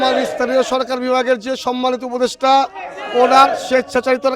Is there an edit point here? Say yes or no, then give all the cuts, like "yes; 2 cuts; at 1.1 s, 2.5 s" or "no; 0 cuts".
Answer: no; 0 cuts